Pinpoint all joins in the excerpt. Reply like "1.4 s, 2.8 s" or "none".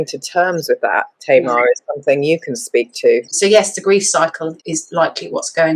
3.3 s, 4.6 s